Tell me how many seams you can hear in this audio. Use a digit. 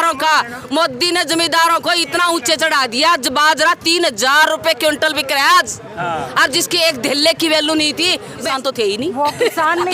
1